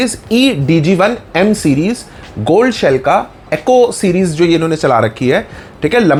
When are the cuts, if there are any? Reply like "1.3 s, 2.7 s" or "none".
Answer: none